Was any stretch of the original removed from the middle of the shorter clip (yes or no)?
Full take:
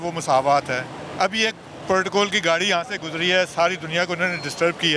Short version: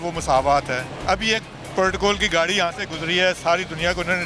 yes